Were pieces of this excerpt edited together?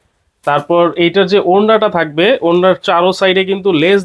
no; 0 cuts

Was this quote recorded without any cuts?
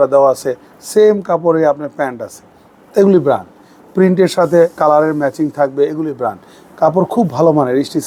yes; 0 cuts

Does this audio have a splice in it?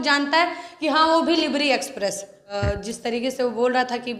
yes; 1 cut; at 2.5 s

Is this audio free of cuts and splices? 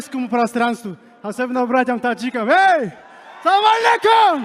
yes; 0 cuts

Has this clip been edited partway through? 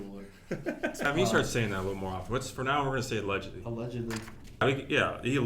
yes; 2 cuts; at 1.0 s, 4.6 s

